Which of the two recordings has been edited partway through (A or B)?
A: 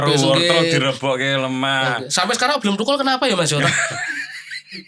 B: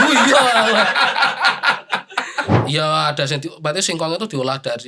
B